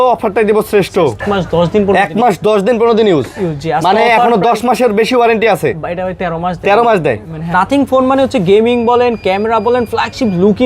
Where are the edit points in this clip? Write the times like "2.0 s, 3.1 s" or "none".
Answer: 1.2 s, 7.5 s

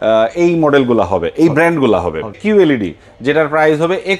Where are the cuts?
2.3 s

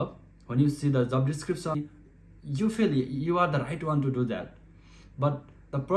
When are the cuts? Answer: 1.7 s

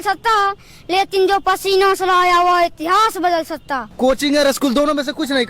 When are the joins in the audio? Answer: 3.9 s

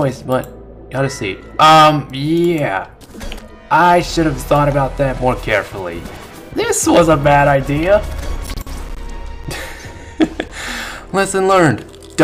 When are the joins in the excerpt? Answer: none

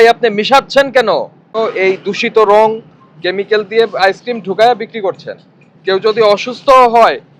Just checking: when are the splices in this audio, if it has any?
1.5 s

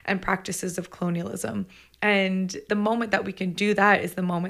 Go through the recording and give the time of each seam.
2.6 s

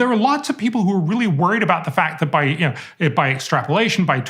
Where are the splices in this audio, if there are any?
none

